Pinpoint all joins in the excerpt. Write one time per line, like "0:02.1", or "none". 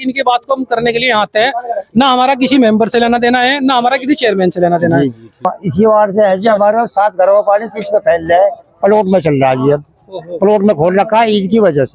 0:05.6